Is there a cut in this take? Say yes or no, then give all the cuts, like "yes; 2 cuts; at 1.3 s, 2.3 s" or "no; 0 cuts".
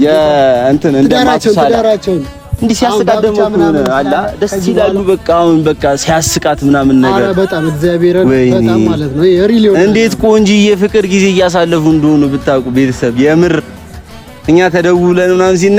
no; 0 cuts